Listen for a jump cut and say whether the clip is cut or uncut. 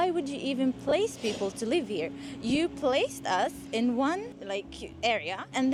uncut